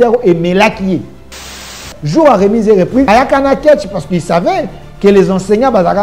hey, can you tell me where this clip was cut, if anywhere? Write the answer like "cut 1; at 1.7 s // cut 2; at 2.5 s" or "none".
cut 1; at 1.7 s // cut 2; at 3.1 s